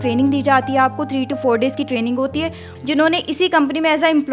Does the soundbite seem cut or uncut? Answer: cut